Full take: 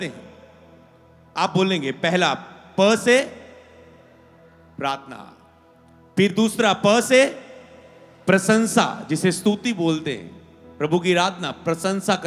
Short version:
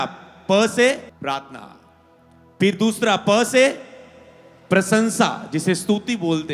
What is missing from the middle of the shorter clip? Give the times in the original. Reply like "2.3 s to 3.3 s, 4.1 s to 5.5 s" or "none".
3.4 s to 4.7 s